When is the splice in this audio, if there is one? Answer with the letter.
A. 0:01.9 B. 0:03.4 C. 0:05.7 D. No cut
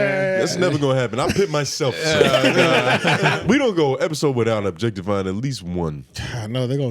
B